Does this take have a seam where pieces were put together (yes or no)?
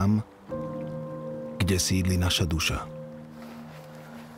yes